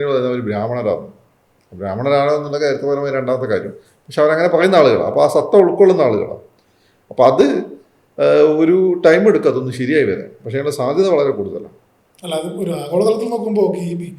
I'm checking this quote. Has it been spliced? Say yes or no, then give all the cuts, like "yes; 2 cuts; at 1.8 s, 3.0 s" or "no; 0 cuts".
no; 0 cuts